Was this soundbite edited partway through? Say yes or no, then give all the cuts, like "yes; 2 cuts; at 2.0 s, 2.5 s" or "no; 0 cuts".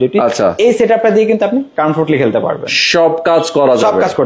no; 0 cuts